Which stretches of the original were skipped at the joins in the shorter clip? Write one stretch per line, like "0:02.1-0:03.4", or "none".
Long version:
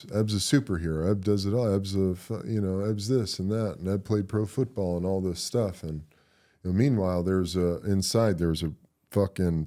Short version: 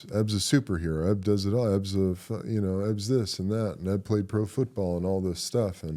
none